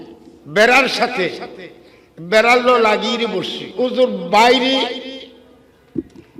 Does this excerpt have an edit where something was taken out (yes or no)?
yes